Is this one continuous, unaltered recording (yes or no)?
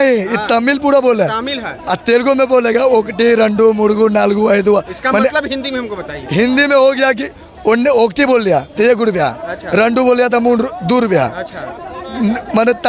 yes